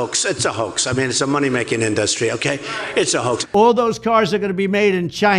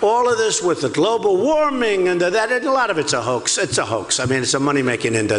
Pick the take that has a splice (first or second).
first